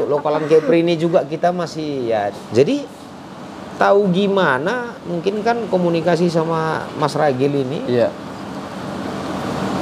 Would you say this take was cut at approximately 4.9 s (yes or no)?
no